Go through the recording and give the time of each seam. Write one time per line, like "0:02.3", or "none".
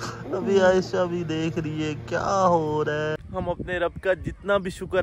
0:03.2